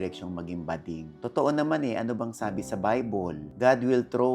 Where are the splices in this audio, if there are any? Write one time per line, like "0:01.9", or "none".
0:01.1
0:03.5